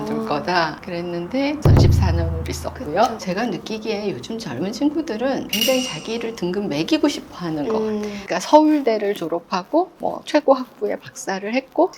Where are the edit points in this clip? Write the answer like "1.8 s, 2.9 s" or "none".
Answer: 3.2 s, 8.2 s